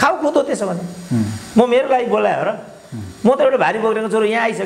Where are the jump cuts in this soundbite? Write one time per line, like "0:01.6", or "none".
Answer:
none